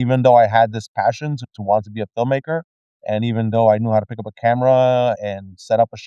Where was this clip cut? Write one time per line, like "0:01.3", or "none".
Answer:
0:01.5